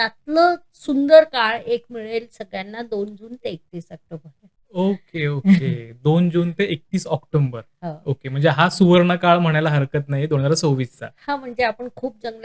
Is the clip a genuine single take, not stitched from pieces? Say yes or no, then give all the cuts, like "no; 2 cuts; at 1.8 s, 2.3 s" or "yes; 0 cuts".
yes; 0 cuts